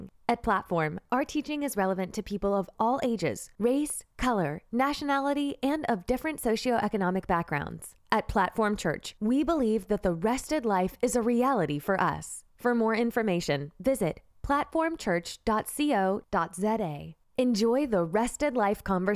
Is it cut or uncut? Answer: uncut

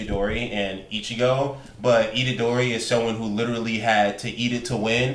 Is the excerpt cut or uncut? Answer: uncut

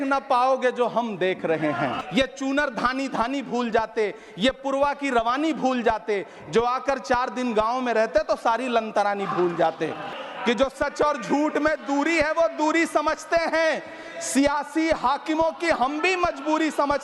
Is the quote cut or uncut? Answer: cut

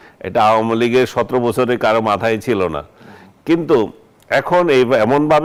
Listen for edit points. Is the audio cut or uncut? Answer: uncut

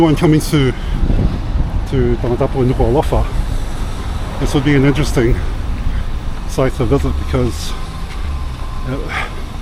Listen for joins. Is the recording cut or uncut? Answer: uncut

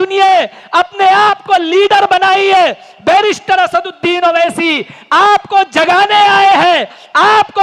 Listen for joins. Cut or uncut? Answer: uncut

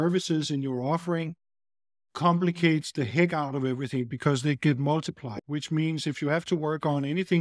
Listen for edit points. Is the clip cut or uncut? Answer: cut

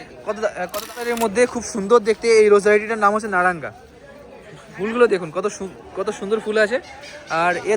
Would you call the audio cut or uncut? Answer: cut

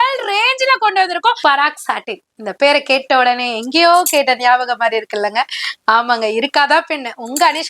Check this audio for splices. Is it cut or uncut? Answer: cut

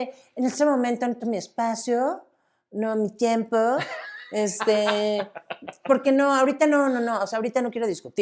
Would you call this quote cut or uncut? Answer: uncut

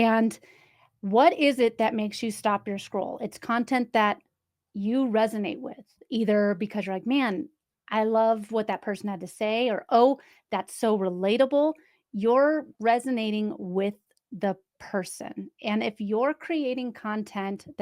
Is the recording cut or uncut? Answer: uncut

